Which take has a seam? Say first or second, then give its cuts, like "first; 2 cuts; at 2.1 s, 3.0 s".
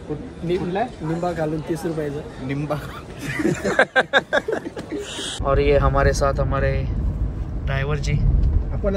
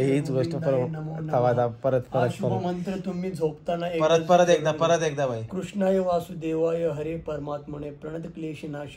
first; 1 cut; at 5.2 s